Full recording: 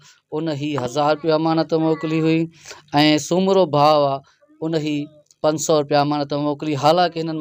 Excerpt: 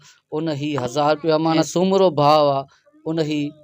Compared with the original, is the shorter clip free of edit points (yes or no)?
no